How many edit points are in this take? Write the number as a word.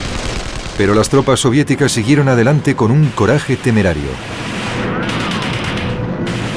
zero